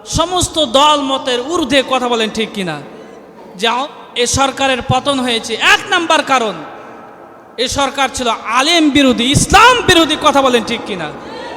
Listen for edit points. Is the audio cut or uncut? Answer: cut